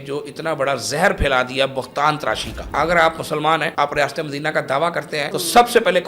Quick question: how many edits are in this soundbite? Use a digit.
3